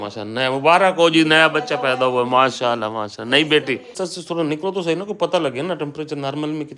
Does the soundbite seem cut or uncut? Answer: cut